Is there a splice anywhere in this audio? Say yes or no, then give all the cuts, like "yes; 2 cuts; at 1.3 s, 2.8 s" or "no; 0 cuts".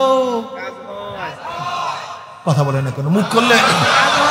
no; 0 cuts